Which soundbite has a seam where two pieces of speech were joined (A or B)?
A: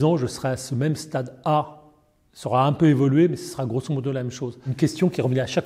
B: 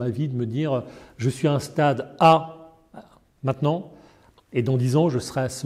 A